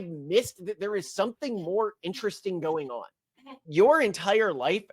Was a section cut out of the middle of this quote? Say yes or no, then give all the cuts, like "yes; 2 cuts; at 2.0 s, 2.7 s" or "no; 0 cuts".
yes; 1 cut; at 3.6 s